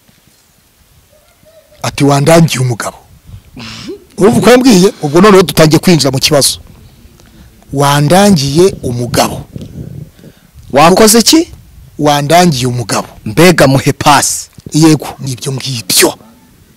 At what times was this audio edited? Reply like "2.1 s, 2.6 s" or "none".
15.2 s